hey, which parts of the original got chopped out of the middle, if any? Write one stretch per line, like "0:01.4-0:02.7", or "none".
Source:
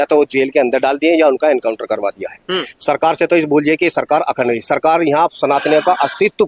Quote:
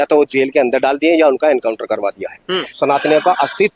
0:02.7-0:05.3